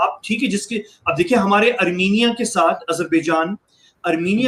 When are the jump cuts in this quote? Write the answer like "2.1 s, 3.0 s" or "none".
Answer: none